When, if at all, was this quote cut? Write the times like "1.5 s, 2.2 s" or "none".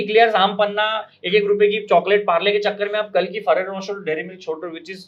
none